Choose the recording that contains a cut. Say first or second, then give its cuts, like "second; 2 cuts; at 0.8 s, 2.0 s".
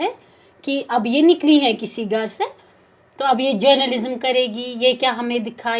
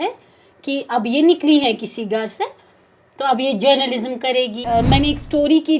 second; 1 cut; at 4.6 s